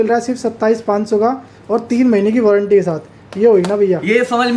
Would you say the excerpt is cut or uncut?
uncut